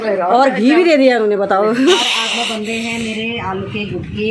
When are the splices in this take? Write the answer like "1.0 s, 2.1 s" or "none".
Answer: 2.0 s